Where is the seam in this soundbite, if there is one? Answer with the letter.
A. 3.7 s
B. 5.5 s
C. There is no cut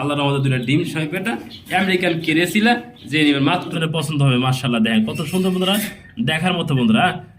A